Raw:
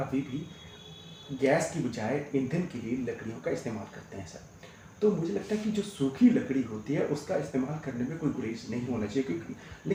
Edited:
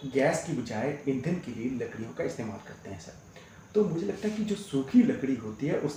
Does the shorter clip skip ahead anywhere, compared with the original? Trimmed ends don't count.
no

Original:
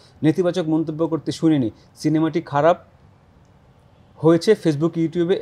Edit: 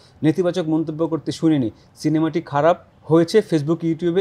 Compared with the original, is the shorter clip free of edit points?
no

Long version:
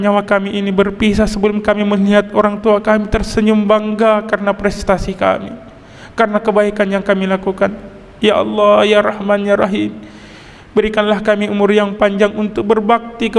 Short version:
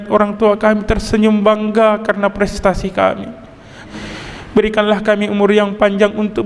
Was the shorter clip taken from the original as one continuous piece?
no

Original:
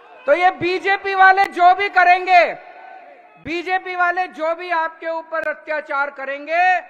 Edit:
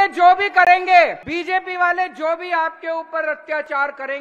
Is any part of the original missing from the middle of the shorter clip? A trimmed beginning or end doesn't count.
yes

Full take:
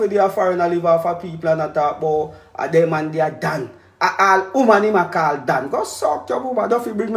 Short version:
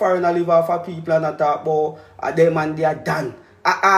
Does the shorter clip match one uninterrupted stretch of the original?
yes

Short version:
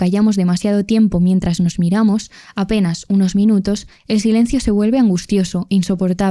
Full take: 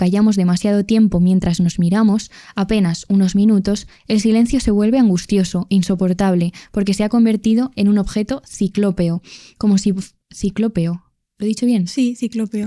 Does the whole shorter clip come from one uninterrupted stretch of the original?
yes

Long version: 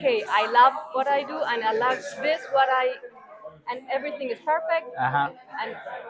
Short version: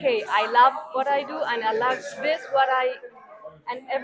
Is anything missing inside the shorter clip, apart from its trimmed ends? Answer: no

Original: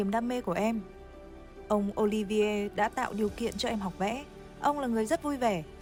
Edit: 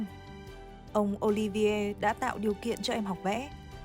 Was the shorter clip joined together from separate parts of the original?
no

